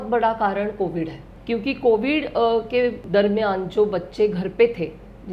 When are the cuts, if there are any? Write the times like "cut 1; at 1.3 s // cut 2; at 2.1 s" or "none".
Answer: cut 1; at 1.3 s // cut 2; at 3.0 s